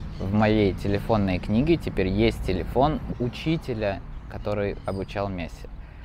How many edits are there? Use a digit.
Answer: 1